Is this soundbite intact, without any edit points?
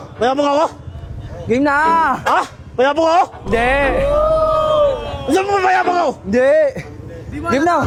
yes; 0 cuts

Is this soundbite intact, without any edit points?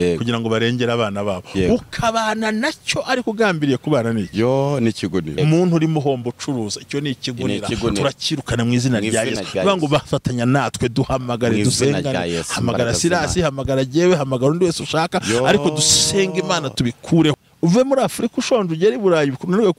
no; 2 cuts; at 5.4 s, 17.3 s

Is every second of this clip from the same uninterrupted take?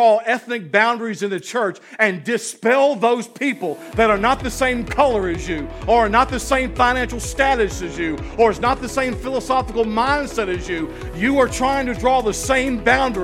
yes; 0 cuts

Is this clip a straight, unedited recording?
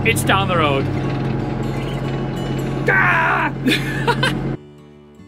yes; 0 cuts

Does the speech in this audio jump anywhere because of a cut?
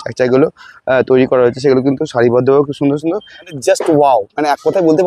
yes; 1 cut; at 3.3 s

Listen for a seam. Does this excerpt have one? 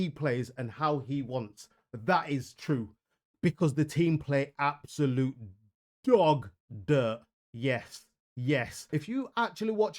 yes; 1 cut; at 8.8 s

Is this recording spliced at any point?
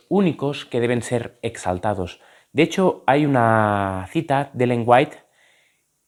no; 0 cuts

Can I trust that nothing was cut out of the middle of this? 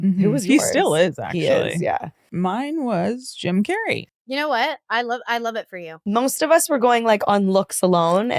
no; 3 cuts; at 2.2 s, 4.1 s, 5.8 s

